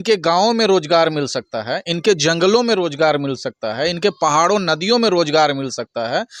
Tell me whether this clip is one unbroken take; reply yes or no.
yes